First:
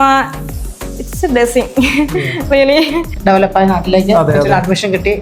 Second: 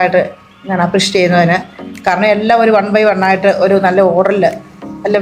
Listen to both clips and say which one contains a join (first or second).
first